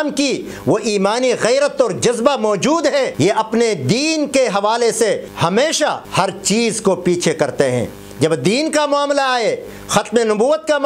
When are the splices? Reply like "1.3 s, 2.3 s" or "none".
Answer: 3.1 s, 5.3 s, 6.0 s